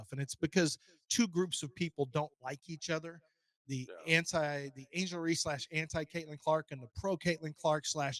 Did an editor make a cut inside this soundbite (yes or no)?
no